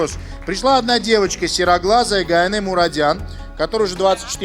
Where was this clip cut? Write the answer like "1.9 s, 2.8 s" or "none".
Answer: none